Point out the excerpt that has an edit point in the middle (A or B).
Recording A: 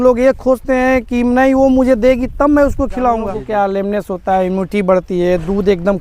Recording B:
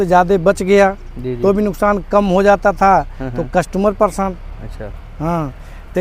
A